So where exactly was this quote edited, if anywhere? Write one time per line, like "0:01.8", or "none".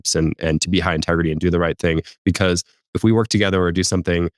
0:02.9